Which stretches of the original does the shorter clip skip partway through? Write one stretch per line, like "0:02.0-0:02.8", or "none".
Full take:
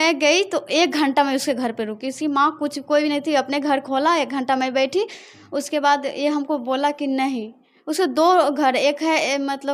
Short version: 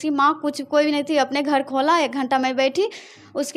none